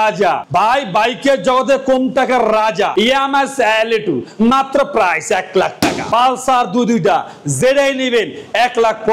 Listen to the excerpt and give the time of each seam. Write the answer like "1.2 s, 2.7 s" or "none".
2.9 s, 6.0 s